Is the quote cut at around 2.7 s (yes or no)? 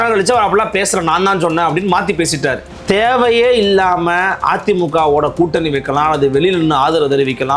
yes